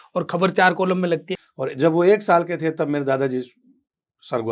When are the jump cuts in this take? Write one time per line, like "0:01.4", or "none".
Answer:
0:01.3